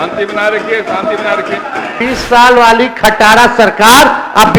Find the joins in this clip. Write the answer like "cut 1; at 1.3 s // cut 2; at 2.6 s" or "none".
cut 1; at 1.9 s